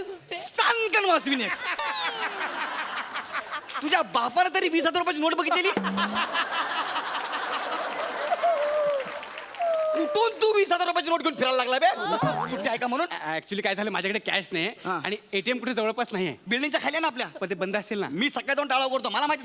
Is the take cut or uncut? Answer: uncut